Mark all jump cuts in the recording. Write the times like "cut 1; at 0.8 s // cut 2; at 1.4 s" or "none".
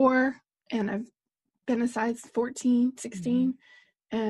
none